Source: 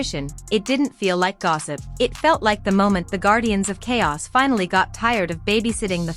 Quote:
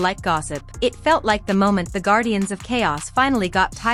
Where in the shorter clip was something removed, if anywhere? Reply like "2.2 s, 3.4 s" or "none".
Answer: none

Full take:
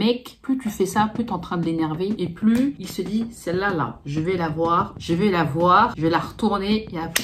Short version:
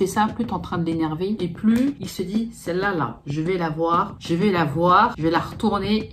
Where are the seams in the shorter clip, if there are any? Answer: none

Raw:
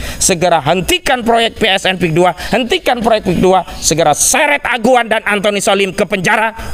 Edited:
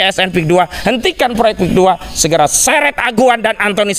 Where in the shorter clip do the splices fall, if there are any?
none

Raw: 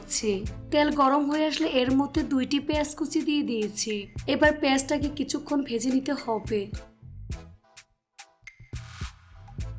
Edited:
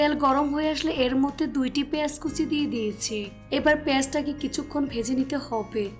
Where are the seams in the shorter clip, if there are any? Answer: none

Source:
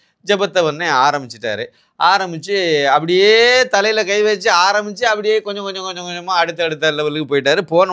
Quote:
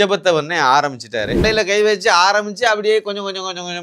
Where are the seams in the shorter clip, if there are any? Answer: 1.4 s

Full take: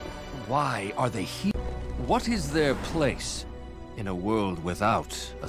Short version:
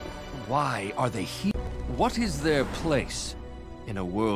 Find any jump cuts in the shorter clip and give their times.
1.8 s

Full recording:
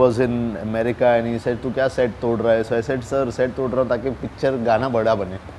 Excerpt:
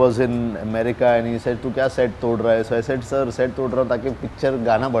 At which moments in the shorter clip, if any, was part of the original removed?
none

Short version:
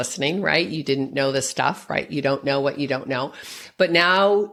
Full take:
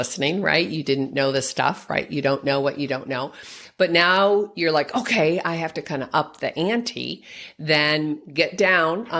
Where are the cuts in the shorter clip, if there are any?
none

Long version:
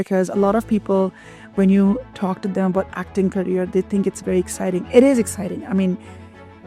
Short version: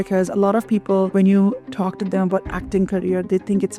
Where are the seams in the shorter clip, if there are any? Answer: 1.1 s

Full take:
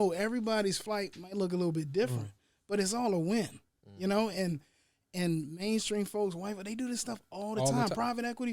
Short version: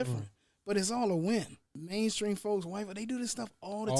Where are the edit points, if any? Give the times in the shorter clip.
1.8 s

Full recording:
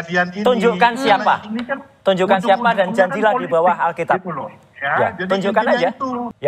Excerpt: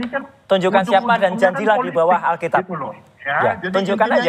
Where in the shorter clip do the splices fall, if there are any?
none

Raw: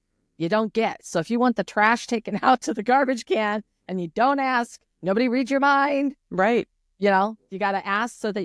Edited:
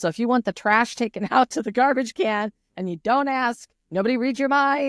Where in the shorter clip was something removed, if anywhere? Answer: none

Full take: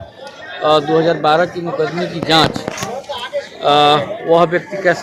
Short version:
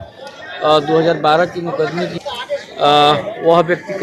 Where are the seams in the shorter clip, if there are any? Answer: 2.2 s

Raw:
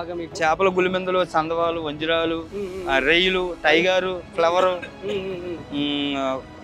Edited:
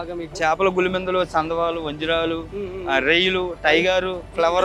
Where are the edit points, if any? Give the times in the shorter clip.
none

